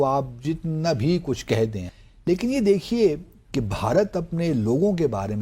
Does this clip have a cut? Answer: yes; 1 cut; at 1.8 s

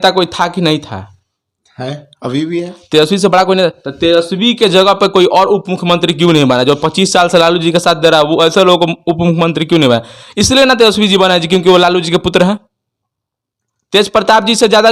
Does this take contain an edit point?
no; 0 cuts

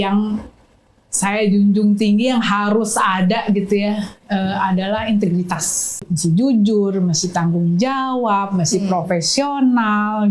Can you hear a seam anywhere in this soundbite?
yes; 1 cut; at 6.0 s

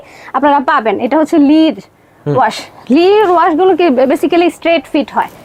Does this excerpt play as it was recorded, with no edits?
yes; 0 cuts

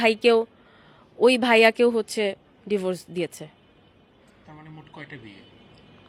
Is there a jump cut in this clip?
no; 0 cuts

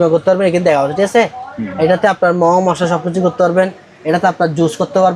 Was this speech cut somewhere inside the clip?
no; 0 cuts

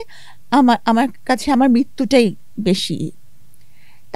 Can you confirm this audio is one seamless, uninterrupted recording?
yes; 0 cuts

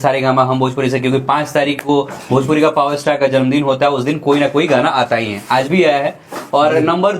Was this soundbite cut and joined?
no; 0 cuts

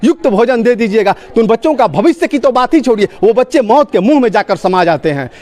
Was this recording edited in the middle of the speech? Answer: no; 0 cuts

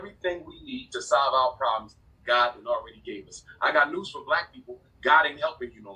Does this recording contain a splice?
no; 0 cuts

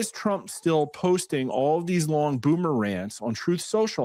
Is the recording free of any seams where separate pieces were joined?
yes; 0 cuts

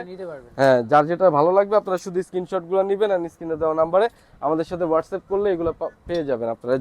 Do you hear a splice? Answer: no; 0 cuts

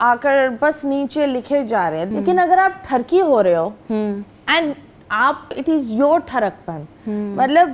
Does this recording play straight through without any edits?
no; 2 cuts; at 2.1 s, 5.6 s

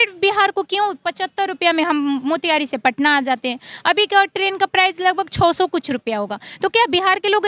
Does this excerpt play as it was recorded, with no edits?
yes; 0 cuts

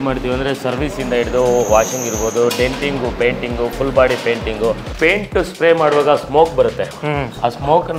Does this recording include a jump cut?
yes; 1 cut; at 4.9 s

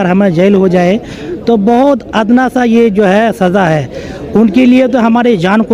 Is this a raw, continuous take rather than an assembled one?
yes; 0 cuts

